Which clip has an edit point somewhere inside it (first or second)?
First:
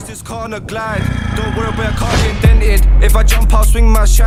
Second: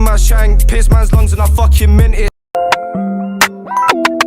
second